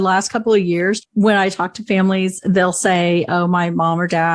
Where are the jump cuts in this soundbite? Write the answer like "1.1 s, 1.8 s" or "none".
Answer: 1.0 s